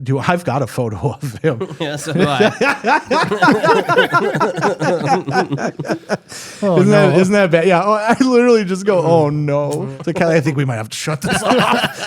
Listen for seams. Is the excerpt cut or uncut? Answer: cut